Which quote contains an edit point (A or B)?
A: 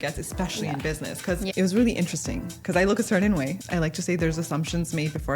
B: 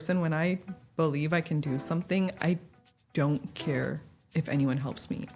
A